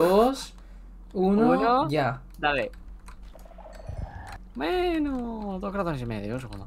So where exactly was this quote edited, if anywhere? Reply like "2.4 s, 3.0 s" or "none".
4.3 s